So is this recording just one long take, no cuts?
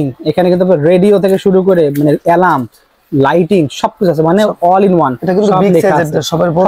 yes; 0 cuts

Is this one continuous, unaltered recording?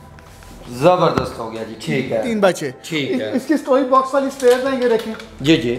no; 1 cut; at 2.3 s

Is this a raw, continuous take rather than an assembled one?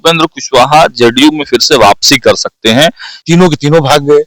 no; 1 cut; at 3.1 s

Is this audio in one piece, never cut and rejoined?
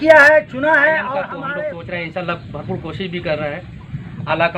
no; 1 cut; at 1.4 s

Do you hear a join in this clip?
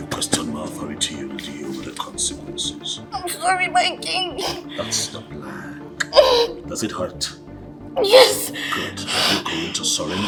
no; 0 cuts

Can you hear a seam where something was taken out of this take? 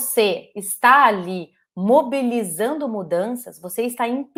no; 0 cuts

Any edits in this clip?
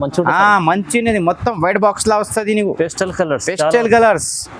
no; 0 cuts

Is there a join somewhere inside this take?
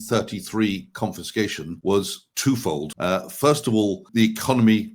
yes; 3 cuts; at 1.7 s, 2.9 s, 4.0 s

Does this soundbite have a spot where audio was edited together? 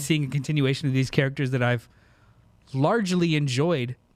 no; 0 cuts

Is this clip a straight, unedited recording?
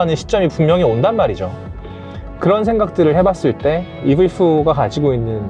no; 1 cut; at 3.9 s

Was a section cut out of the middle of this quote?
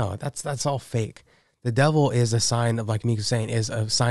no; 0 cuts

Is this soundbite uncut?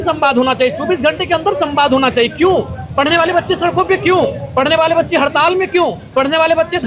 yes; 0 cuts

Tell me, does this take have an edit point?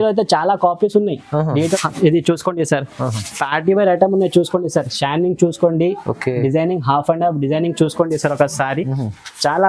yes; 1 cut; at 1.8 s

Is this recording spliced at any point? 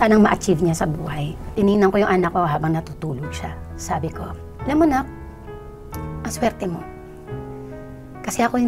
no; 0 cuts

